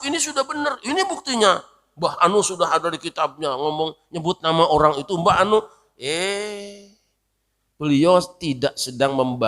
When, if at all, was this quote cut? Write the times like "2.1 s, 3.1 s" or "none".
none